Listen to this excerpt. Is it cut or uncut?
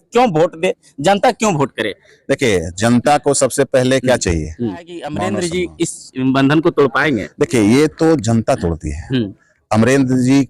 cut